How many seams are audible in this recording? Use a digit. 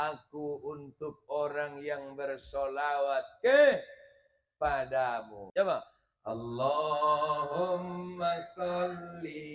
1